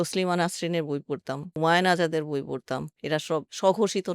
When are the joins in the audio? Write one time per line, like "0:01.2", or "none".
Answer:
0:03.2